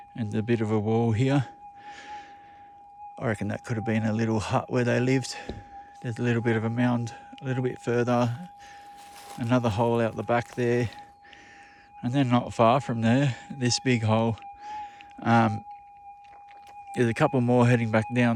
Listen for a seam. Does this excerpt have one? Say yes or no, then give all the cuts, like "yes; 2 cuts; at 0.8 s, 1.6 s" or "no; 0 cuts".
no; 0 cuts